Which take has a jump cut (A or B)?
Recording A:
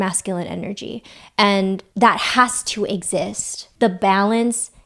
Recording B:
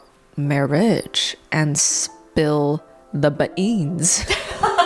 A